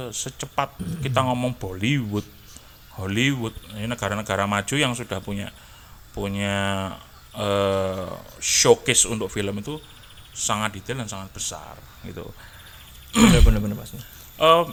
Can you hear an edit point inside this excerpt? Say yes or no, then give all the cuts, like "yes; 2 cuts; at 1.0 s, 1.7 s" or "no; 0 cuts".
no; 0 cuts